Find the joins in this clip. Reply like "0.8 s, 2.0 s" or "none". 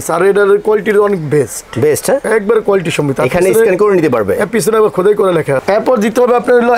5.6 s